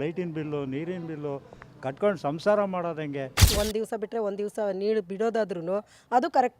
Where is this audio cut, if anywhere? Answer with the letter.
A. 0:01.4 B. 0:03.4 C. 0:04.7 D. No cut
B